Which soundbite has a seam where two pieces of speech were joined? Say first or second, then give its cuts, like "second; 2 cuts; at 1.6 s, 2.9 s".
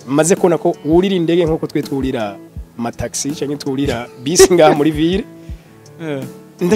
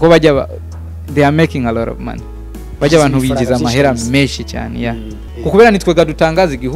second; 1 cut; at 5.2 s